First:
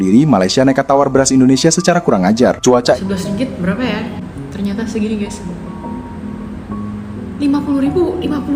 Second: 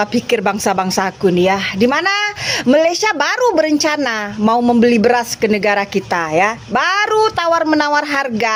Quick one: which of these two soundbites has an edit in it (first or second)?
first